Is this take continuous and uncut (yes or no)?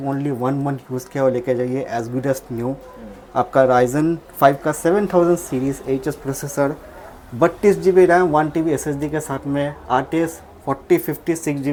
yes